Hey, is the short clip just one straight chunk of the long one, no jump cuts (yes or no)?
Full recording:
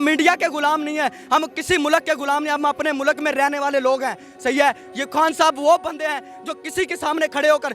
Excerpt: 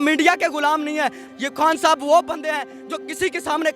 no